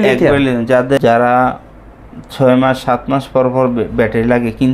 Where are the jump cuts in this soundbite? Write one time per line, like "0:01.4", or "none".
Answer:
0:01.0